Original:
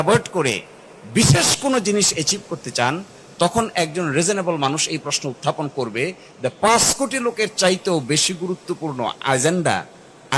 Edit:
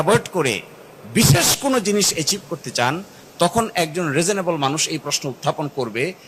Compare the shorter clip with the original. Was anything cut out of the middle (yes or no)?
no